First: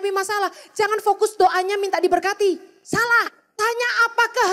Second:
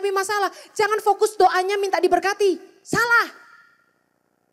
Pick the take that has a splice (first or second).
first